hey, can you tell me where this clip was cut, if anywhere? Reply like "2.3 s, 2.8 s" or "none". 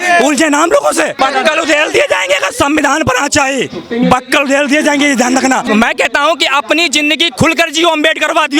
1.2 s, 5.6 s